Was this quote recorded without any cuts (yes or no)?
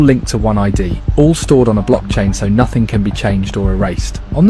no